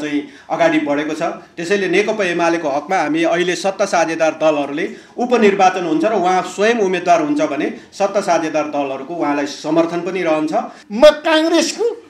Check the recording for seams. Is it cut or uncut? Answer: cut